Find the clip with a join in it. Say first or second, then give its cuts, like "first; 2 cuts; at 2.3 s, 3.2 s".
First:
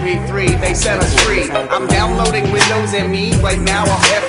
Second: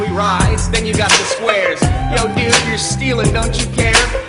first; 1 cut; at 3.3 s